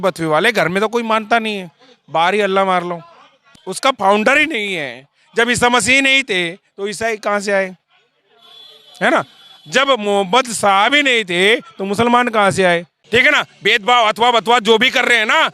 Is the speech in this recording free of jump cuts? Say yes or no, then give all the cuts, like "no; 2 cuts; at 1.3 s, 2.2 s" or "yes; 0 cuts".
no; 2 cuts; at 3.5 s, 12.9 s